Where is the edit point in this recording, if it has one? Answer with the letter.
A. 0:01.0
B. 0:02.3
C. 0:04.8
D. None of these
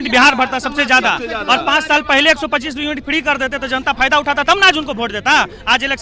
D